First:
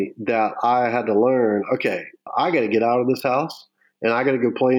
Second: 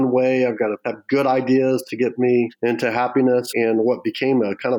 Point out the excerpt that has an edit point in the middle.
second; 3 cuts; at 0.9 s, 2.5 s, 3.5 s

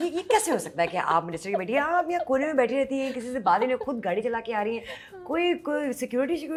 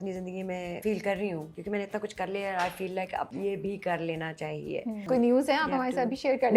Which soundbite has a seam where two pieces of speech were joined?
second; 4 cuts; at 0.8 s, 1.5 s, 3.3 s, 5.1 s

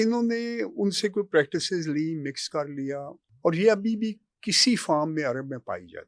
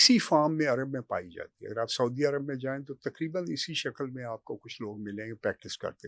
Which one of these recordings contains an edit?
first; 1 cut; at 3.2 s

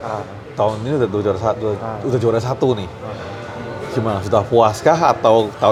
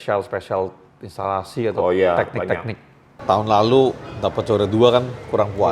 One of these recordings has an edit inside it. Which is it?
second; 1 cut; at 3.1 s

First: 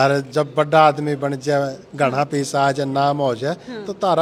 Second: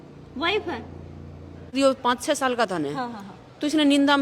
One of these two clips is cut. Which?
second; 1 cut; at 1.8 s

